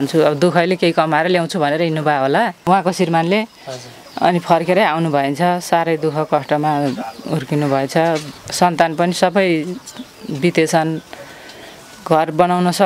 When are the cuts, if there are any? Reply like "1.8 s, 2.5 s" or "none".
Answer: 2.6 s